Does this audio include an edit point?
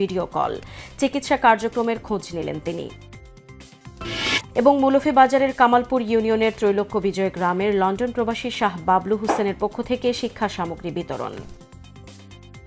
no; 0 cuts

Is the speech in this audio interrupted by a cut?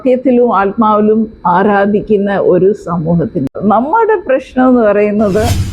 yes; 1 cut; at 3.5 s

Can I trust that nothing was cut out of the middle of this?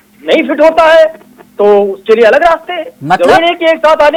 yes; 0 cuts

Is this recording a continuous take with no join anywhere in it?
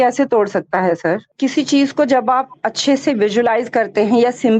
no; 1 cut; at 1.3 s

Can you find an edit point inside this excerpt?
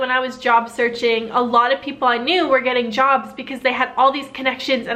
no; 0 cuts

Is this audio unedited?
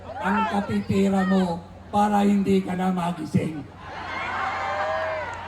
yes; 0 cuts

